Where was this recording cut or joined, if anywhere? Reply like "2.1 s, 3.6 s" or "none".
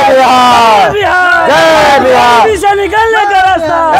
none